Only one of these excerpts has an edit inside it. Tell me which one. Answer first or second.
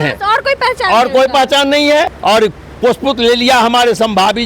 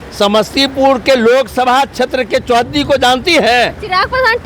first